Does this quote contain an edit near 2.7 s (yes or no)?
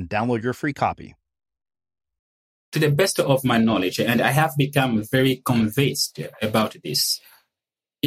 yes